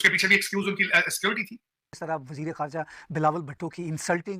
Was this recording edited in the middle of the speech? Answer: yes; 1 cut; at 1.9 s

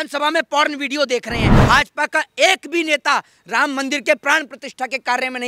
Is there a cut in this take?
yes; 1 cut; at 1.6 s

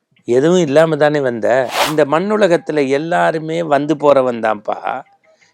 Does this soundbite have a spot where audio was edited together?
yes; 1 cut; at 1.8 s

